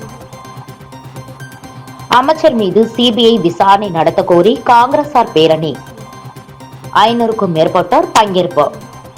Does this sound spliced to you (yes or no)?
yes